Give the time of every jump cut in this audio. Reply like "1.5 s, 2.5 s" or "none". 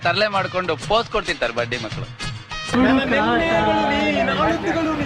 2.7 s